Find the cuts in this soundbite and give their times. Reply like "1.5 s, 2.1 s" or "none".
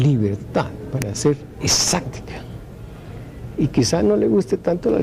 none

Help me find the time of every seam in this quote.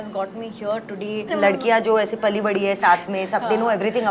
1.3 s

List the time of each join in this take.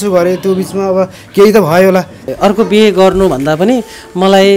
2.2 s

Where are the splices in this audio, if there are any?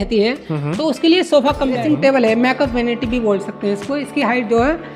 1.8 s

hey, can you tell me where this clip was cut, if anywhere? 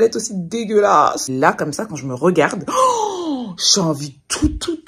1.2 s

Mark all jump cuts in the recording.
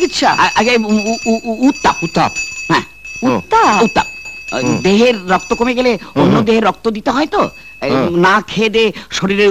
none

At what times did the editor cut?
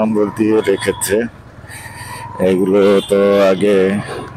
none

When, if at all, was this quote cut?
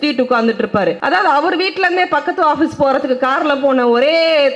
1.0 s

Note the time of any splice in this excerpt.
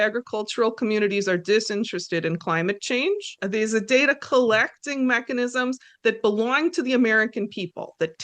3.3 s

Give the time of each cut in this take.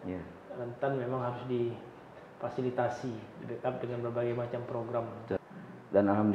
5.4 s

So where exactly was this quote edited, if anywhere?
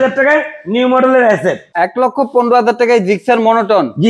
1.6 s

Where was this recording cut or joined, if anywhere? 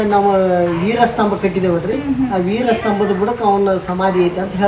none

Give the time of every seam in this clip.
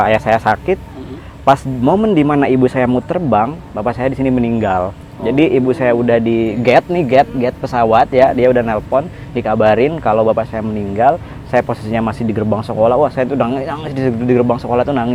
none

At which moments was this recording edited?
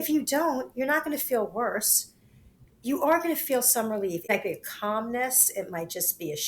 4.3 s

